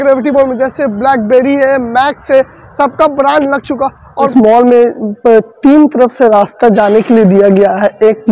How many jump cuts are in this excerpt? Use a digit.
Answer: 1